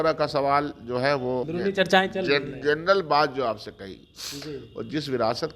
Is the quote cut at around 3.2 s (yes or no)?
no